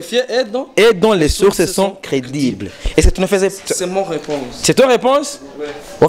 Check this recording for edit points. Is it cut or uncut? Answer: uncut